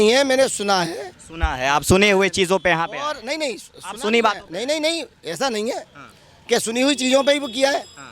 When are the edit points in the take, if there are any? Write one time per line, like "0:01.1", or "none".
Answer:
none

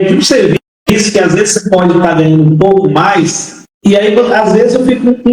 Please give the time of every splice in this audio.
none

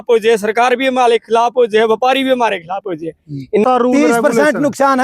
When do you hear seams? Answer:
0:03.6

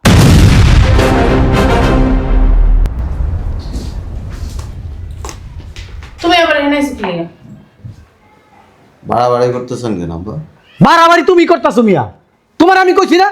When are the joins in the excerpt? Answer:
none

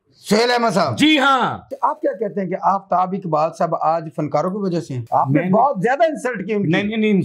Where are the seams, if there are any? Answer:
0:01.7
0:05.0

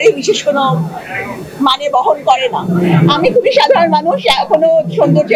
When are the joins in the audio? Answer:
0:02.6

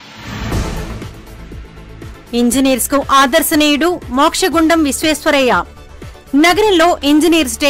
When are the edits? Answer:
none

